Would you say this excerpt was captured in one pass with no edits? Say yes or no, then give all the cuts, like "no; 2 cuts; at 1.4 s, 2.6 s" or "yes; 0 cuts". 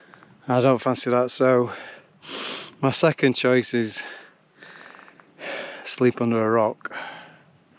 yes; 0 cuts